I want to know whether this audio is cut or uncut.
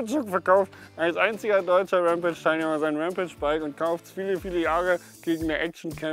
uncut